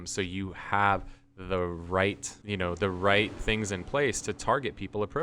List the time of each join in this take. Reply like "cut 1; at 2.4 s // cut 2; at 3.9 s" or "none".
cut 1; at 2.3 s